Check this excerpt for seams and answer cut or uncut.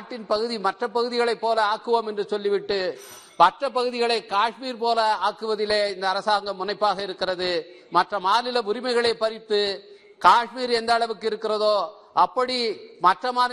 uncut